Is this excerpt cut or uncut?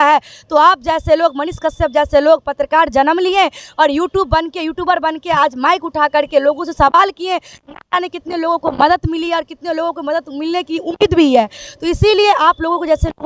uncut